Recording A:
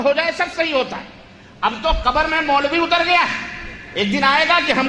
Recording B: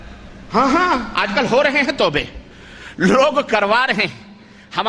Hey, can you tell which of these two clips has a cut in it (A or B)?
A